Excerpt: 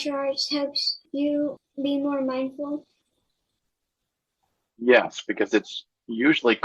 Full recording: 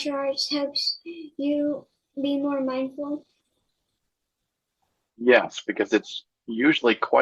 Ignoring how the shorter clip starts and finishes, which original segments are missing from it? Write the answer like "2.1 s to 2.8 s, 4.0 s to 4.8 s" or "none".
1.4 s to 1.8 s